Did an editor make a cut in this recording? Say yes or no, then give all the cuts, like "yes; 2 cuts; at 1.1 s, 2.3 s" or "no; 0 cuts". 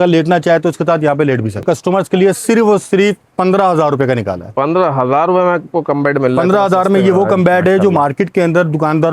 yes; 1 cut; at 1.6 s